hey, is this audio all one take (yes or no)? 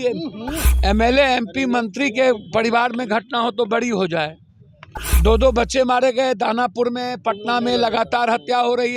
yes